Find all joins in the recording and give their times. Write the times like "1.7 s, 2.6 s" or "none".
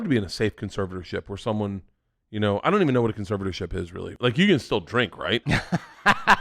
4.0 s, 5.4 s

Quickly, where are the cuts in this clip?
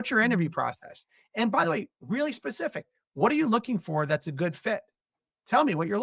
none

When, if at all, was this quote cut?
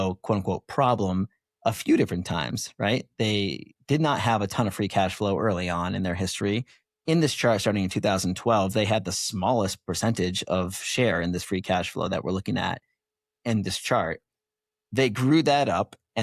none

